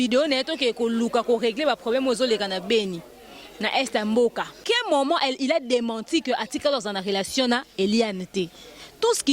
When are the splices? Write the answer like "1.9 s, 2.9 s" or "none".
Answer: 4.6 s